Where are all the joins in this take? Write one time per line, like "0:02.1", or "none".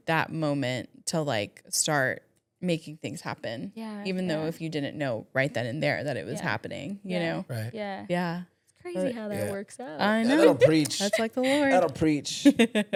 none